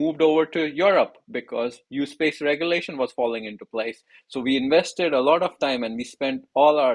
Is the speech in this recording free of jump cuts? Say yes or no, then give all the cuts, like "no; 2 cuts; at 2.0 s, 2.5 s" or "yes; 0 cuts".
yes; 0 cuts